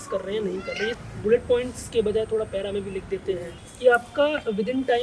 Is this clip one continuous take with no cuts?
no; 2 cuts; at 1.0 s, 3.6 s

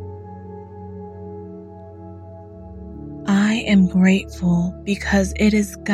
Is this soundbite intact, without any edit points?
yes; 0 cuts

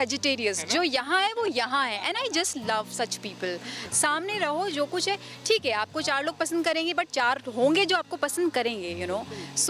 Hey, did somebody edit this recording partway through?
no; 0 cuts

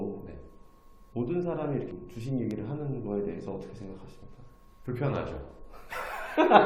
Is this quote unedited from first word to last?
yes; 0 cuts

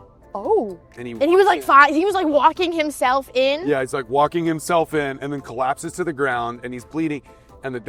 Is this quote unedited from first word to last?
yes; 0 cuts

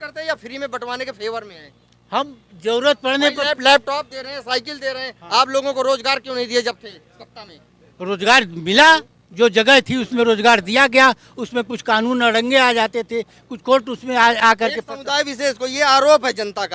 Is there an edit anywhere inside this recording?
no; 0 cuts

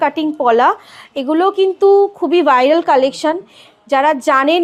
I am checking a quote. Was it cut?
no; 0 cuts

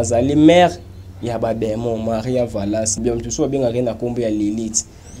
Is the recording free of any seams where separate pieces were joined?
no; 1 cut; at 2.9 s

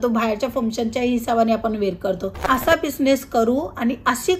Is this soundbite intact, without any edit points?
no; 1 cut; at 2.4 s

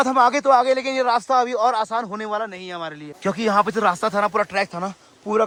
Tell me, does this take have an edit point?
no; 0 cuts

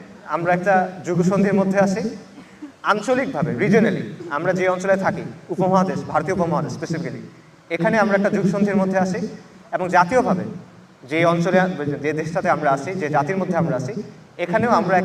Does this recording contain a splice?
no; 0 cuts

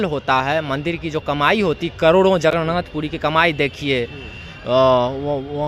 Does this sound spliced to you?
no; 0 cuts

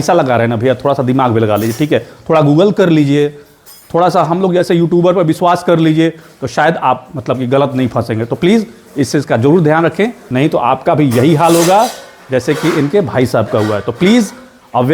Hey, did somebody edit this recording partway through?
yes; 1 cut; at 10.2 s

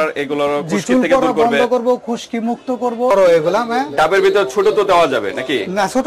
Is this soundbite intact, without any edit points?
no; 1 cut; at 3.1 s

